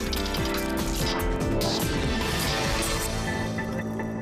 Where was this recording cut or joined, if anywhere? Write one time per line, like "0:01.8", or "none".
none